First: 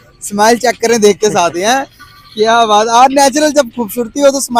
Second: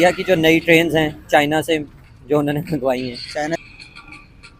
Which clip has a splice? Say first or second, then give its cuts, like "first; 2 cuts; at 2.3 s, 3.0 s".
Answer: second; 1 cut; at 3.6 s